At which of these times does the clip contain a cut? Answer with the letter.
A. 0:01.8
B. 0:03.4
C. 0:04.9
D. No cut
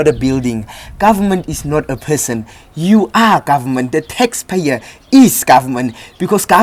D